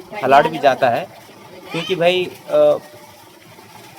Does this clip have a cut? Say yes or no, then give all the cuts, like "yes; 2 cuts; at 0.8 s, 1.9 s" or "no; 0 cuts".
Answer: no; 0 cuts